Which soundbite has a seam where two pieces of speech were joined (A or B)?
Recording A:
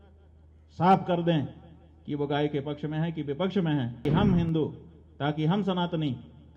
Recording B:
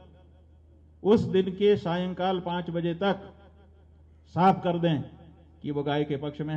A